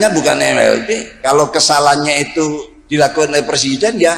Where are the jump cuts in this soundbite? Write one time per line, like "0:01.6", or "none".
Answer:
0:02.7